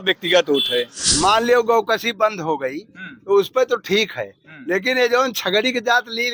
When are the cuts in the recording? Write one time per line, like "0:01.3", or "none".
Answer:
0:01.0